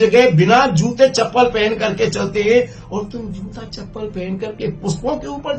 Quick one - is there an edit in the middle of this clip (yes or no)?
no